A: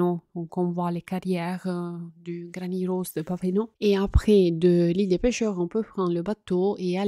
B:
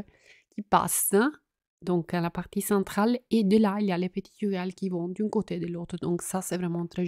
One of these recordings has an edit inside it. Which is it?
A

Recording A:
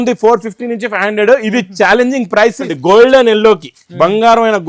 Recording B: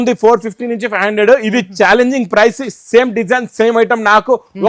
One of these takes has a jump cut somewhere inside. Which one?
A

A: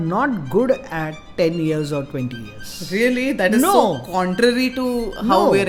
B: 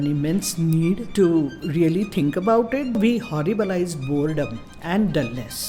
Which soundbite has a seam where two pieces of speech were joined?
B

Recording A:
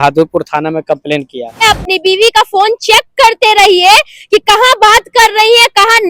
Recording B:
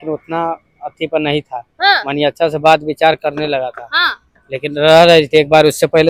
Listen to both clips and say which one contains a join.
A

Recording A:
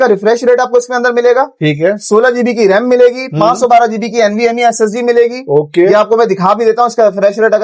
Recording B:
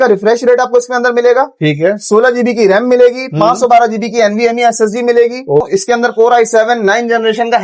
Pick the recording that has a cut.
B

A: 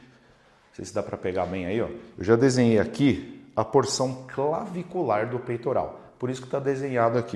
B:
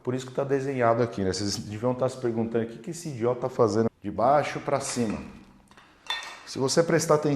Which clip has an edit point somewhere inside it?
B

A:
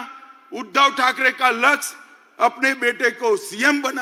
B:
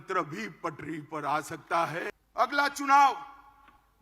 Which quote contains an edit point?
B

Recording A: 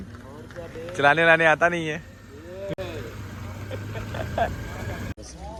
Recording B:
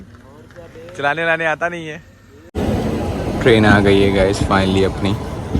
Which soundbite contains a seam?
B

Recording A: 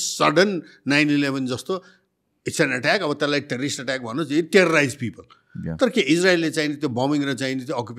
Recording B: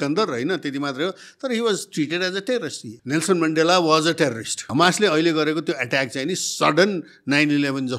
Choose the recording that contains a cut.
B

